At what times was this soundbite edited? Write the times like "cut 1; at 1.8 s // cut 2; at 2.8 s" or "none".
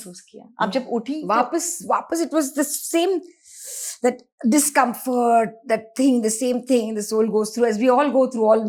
none